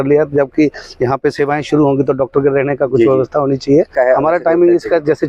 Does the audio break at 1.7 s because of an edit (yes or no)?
no